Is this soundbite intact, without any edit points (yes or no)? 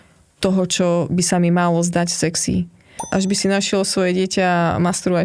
no